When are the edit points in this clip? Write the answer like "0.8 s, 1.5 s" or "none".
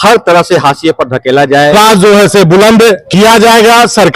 1.7 s, 3.0 s